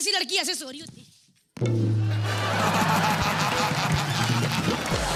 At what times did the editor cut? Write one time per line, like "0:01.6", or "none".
none